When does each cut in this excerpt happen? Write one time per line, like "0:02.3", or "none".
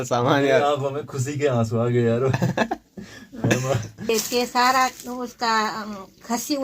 0:04.1